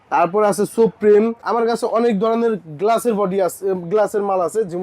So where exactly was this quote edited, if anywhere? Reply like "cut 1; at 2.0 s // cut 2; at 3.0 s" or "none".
cut 1; at 1.4 s